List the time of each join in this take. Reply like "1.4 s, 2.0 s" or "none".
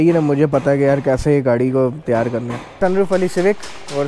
2.8 s